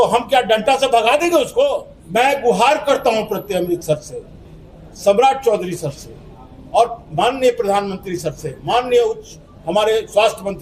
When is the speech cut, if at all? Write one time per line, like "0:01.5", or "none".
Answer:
0:01.9